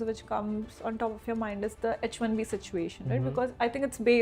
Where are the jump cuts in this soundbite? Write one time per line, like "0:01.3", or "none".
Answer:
none